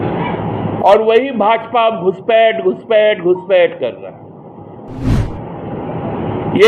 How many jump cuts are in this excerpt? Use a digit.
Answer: 1